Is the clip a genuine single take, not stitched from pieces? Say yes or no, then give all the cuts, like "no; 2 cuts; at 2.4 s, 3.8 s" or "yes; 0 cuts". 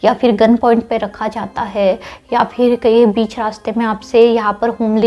yes; 0 cuts